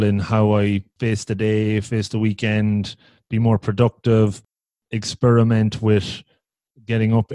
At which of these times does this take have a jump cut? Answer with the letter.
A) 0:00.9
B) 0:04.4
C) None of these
A